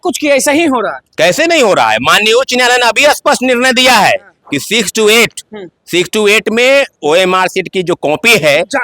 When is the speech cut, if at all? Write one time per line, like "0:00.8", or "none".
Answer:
none